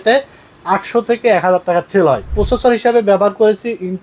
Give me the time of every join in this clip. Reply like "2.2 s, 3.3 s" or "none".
2.3 s